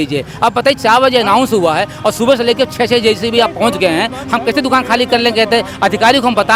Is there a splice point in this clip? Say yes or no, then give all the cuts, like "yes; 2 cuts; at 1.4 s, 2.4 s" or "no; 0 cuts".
no; 0 cuts